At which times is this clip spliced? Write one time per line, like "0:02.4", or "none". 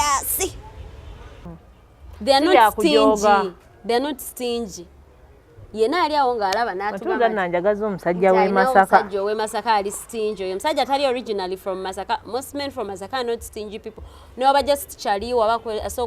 0:01.5